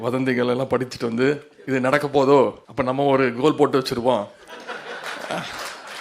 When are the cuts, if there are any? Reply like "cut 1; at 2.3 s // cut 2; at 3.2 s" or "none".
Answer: cut 1; at 1.5 s // cut 2; at 2.7 s